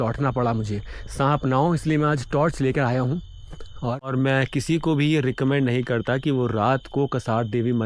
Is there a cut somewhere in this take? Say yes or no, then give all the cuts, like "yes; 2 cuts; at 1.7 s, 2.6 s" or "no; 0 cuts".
yes; 1 cut; at 4.1 s